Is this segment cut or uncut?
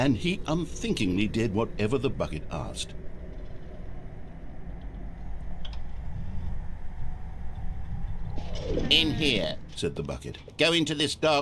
cut